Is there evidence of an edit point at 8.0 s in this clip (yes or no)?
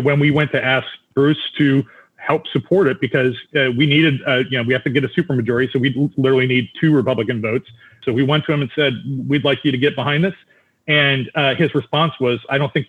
yes